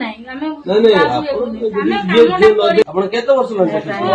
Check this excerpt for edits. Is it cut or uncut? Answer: cut